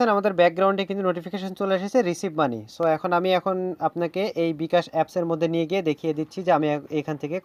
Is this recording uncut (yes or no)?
yes